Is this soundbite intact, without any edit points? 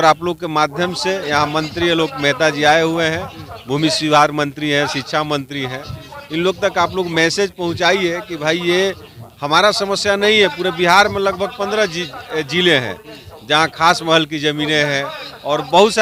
yes; 0 cuts

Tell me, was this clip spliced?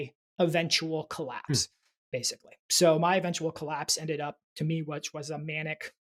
no; 0 cuts

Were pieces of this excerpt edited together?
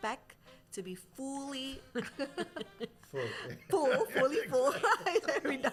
no; 0 cuts

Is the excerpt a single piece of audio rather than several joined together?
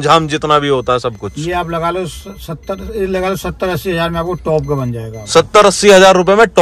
yes; 0 cuts

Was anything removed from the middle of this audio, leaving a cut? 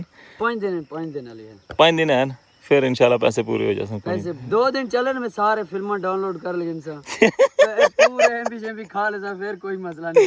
no; 0 cuts

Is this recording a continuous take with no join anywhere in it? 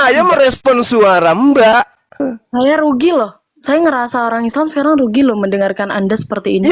no; 1 cut; at 2.3 s

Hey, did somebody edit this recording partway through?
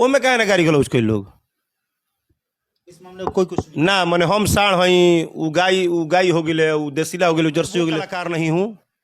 yes; 1 cut; at 8.1 s

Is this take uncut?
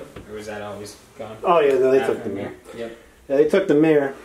yes; 0 cuts

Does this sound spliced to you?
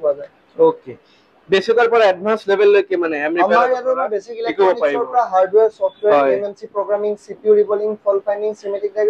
no; 0 cuts

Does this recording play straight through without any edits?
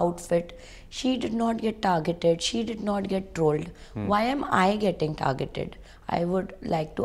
yes; 0 cuts

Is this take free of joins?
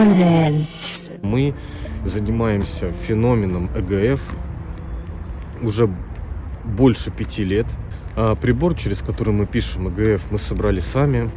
no; 1 cut; at 1.2 s

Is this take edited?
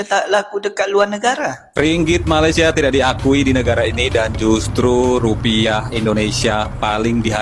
no; 0 cuts

